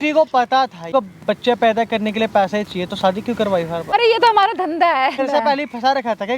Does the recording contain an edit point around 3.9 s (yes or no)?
yes